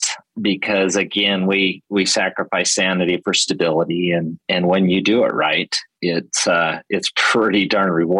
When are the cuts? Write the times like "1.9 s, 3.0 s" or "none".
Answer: none